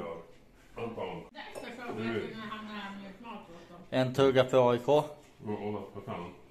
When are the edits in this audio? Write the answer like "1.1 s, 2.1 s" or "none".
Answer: 1.3 s